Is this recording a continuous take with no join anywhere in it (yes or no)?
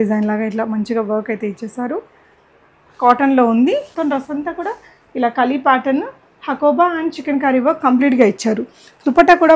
no